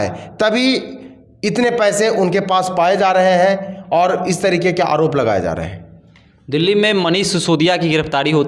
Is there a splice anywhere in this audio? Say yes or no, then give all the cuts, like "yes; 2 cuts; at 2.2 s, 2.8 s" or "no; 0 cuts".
no; 0 cuts